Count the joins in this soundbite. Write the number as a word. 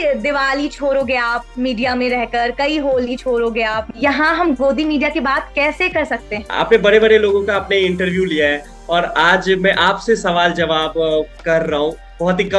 two